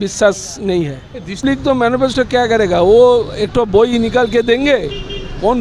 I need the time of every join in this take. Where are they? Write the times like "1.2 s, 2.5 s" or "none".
1.4 s